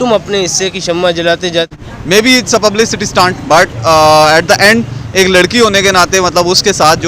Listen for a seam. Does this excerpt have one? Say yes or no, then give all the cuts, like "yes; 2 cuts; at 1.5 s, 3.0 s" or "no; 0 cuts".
yes; 1 cut; at 1.7 s